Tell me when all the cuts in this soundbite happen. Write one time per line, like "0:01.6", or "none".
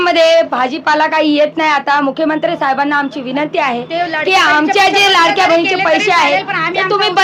none